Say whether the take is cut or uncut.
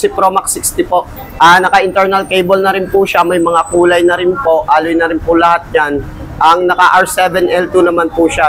cut